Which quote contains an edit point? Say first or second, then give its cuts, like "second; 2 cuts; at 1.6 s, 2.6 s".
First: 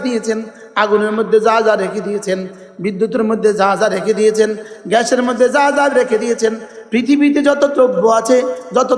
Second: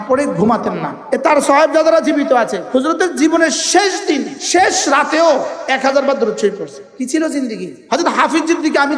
second; 5 cuts; at 0.9 s, 2.6 s, 4.3 s, 6.8 s, 7.7 s